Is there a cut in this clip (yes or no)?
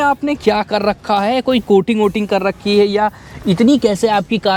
no